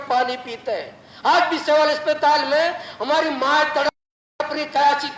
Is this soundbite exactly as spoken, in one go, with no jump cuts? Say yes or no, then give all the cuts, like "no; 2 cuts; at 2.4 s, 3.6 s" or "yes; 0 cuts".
yes; 0 cuts